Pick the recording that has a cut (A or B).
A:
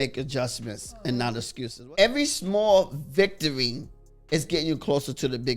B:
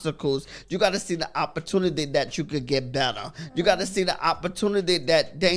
A